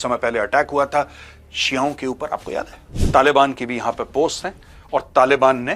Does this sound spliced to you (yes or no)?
yes